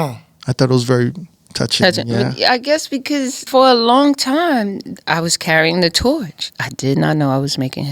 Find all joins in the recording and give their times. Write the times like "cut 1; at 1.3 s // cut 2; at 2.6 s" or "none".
cut 1; at 3.4 s // cut 2; at 4.8 s // cut 3; at 6.4 s